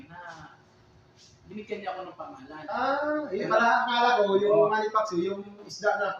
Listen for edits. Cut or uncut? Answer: cut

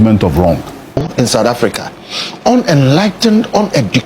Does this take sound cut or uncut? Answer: cut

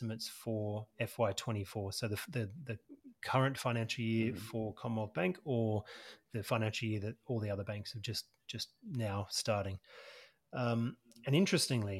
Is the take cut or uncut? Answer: uncut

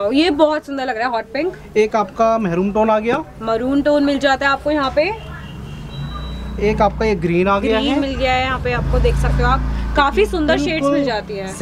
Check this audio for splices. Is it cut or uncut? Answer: uncut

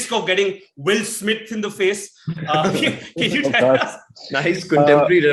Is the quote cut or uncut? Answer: uncut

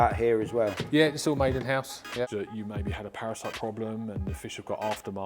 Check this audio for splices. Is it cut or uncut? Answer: cut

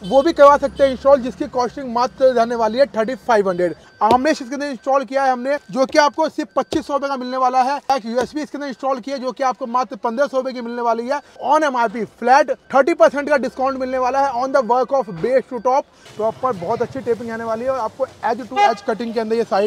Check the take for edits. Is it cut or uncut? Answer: cut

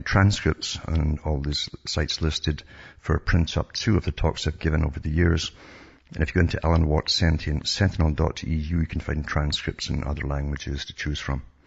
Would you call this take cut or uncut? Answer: uncut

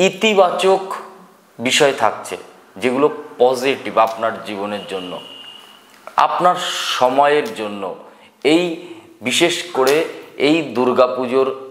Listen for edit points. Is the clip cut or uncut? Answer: uncut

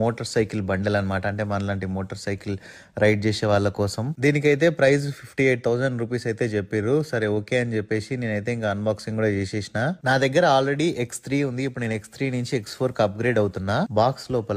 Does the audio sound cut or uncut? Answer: uncut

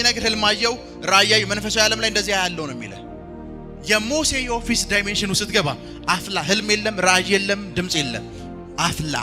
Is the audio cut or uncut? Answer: uncut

